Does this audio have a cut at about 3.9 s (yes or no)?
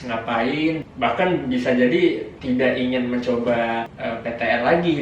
yes